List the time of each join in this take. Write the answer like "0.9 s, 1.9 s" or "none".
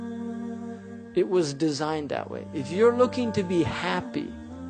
none